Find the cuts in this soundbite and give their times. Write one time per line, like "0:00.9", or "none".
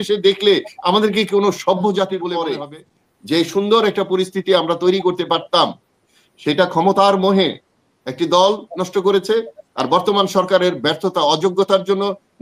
0:02.5